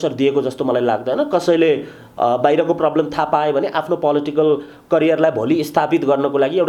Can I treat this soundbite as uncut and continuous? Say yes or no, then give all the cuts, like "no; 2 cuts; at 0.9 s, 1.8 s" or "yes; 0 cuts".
yes; 0 cuts